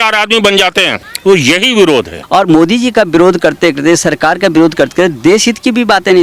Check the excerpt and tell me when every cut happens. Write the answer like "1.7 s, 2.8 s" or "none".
1.0 s, 2.2 s